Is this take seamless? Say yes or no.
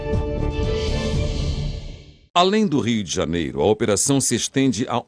no